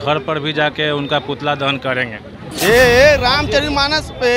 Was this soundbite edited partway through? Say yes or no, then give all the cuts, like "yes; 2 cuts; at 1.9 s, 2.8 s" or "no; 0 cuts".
yes; 1 cut; at 2.4 s